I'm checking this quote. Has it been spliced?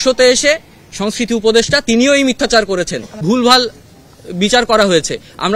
yes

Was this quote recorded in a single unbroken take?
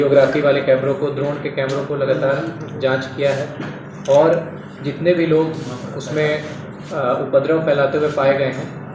yes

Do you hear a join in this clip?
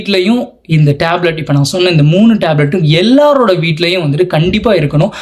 no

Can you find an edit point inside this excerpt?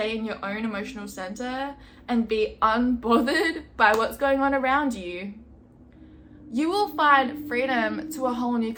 no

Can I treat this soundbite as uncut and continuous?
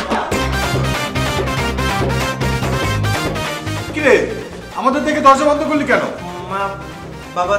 yes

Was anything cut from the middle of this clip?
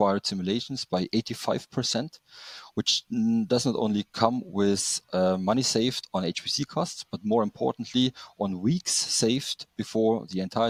no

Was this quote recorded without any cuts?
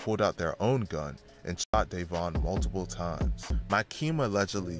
no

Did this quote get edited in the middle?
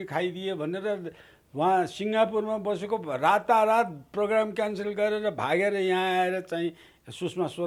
no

